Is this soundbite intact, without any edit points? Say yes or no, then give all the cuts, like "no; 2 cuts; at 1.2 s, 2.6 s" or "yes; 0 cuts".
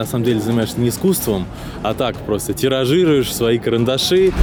yes; 0 cuts